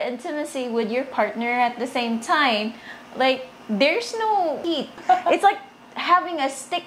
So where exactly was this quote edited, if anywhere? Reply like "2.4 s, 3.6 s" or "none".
4.9 s